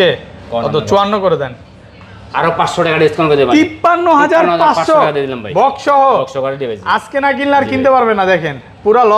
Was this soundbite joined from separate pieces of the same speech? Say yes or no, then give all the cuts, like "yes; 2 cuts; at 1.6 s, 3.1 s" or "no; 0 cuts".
no; 0 cuts